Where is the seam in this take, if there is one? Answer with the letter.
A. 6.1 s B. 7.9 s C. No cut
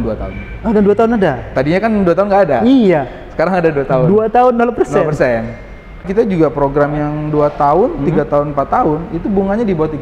A